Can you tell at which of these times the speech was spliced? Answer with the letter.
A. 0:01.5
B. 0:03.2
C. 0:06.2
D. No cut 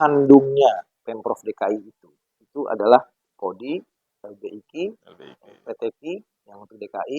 B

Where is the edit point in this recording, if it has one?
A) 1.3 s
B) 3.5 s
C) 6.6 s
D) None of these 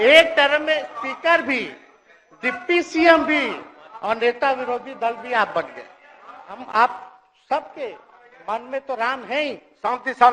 C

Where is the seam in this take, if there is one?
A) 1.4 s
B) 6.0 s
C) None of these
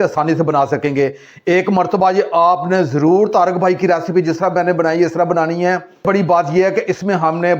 B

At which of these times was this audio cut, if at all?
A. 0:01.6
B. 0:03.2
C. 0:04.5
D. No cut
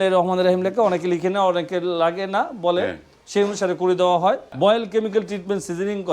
C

